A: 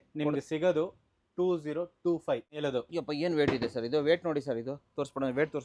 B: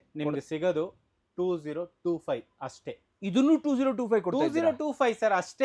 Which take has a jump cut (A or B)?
A